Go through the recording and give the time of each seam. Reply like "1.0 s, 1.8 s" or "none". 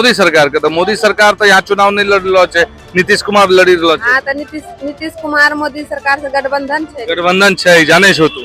none